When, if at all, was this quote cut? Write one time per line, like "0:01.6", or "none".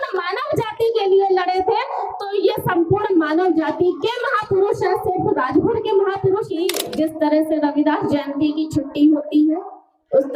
0:06.7